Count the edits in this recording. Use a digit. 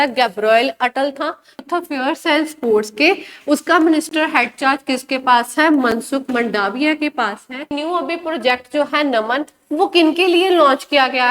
2